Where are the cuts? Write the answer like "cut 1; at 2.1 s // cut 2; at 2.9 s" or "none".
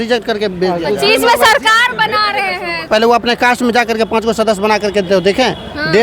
cut 1; at 2.9 s